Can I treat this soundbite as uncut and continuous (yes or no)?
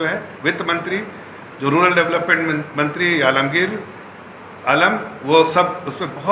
yes